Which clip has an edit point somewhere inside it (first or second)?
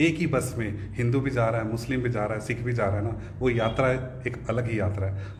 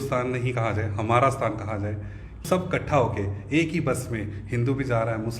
second